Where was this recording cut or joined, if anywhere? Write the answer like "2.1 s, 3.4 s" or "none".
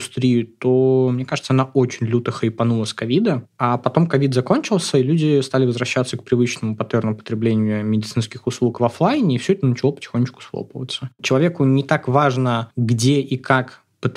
3.5 s, 11.1 s